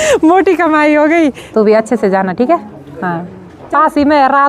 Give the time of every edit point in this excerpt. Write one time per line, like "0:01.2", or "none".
0:01.4